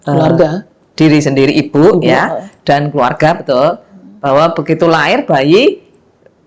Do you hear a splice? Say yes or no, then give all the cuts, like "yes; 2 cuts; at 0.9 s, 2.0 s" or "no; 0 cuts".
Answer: no; 0 cuts